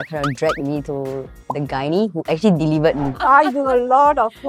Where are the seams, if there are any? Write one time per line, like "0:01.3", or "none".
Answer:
0:03.1